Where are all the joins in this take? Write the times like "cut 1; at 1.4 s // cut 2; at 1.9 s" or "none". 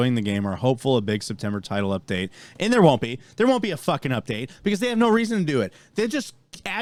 none